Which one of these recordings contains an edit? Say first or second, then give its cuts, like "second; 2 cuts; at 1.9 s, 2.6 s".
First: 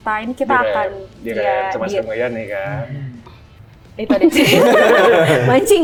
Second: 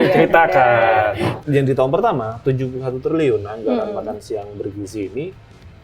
second; 1 cut; at 1.3 s